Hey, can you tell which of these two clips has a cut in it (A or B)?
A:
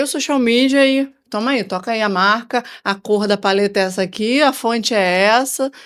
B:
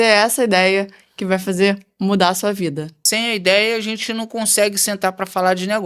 B